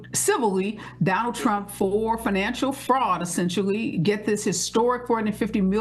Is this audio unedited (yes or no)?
yes